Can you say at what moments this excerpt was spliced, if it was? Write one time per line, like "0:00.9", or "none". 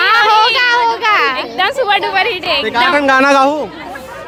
none

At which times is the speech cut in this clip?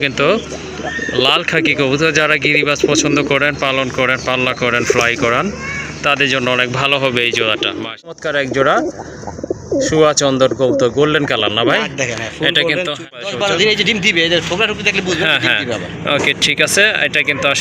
0:08.2
0:13.2

